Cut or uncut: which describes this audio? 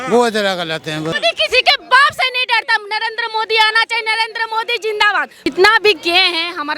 cut